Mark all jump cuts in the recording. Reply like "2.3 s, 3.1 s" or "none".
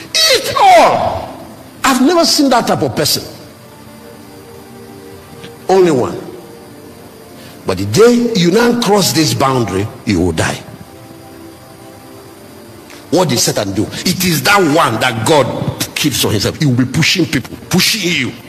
none